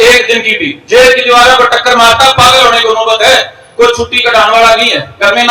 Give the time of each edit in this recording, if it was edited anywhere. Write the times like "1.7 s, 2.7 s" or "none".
none